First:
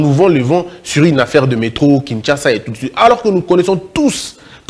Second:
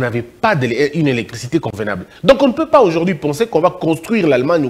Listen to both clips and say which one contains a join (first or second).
second